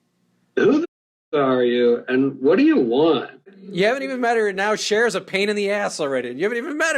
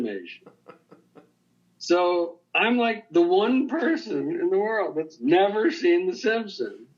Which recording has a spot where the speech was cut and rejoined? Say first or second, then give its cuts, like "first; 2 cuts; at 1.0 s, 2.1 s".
first; 1 cut; at 3.5 s